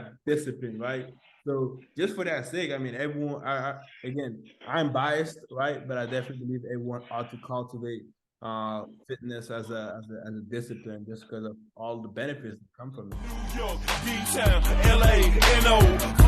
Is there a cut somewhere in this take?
yes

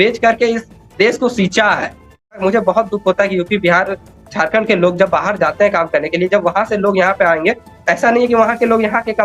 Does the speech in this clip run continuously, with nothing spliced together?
no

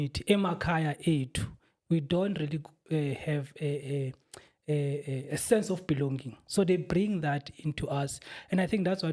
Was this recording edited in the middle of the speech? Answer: no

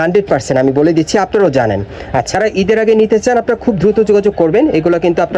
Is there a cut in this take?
yes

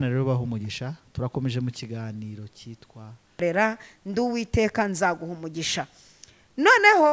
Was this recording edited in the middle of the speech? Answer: yes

